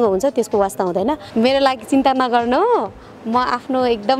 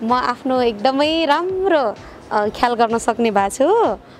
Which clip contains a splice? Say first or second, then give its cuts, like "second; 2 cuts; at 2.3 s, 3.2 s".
first; 1 cut; at 1.2 s